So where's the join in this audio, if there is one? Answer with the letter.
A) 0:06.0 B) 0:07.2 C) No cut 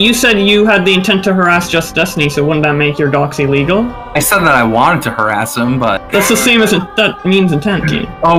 A